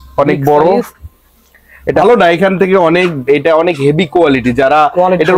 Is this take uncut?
no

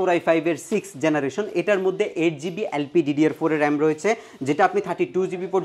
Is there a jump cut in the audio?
no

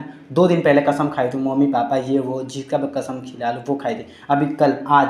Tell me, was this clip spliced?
no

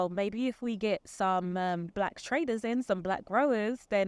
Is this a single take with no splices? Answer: yes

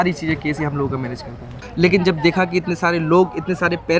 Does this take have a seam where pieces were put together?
yes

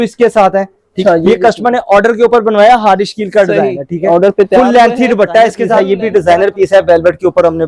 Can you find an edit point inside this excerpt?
yes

